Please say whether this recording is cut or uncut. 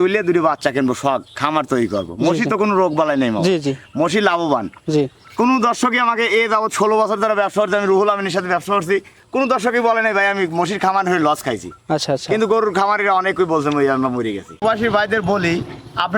cut